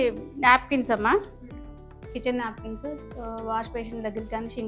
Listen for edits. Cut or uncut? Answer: uncut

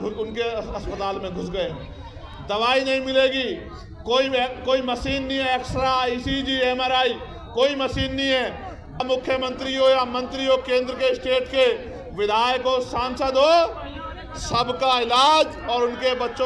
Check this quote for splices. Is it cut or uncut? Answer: cut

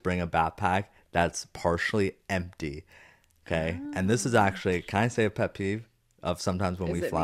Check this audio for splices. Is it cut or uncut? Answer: uncut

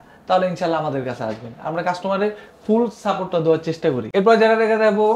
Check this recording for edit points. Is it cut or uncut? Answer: uncut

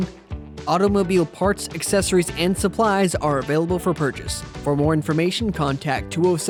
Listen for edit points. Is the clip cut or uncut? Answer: uncut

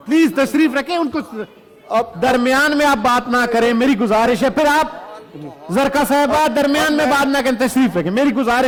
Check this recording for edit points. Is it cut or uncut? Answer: uncut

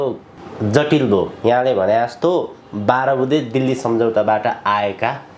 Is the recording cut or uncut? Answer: uncut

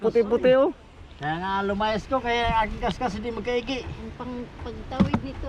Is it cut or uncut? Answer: uncut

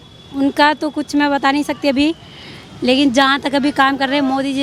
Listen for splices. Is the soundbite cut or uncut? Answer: uncut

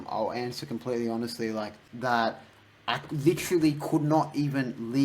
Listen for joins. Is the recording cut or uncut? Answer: cut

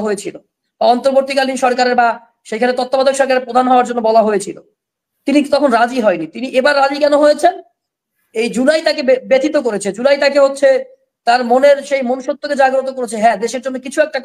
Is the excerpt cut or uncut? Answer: uncut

